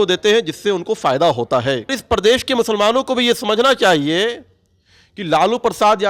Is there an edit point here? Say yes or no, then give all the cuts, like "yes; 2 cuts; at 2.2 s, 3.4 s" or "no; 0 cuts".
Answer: yes; 1 cut; at 2.0 s